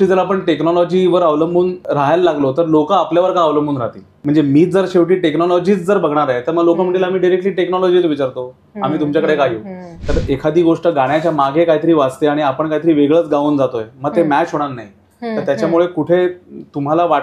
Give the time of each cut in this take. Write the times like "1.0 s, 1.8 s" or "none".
1.8 s, 4.0 s, 9.9 s